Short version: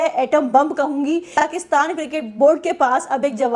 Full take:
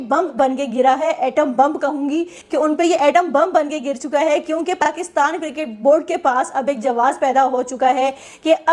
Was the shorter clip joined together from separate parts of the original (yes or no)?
yes